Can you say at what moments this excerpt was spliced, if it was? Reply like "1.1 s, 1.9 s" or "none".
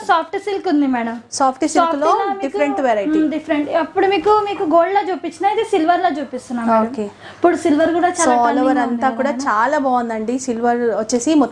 none